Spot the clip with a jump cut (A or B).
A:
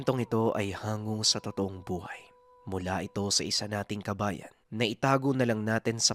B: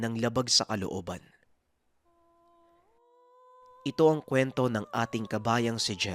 B